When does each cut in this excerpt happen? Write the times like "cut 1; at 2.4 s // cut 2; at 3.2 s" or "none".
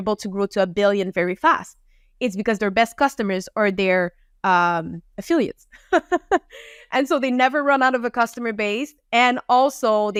none